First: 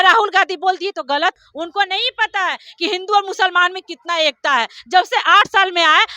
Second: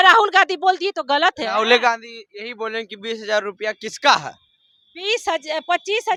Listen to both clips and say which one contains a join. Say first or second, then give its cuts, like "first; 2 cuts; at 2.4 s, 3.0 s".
first; 1 cut; at 1.4 s